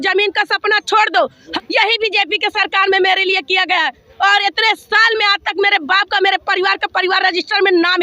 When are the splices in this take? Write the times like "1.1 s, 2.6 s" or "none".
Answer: 1.5 s